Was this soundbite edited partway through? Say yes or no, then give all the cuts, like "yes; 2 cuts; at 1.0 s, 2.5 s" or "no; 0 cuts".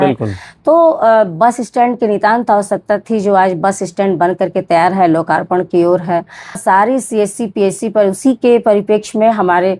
yes; 1 cut; at 6.6 s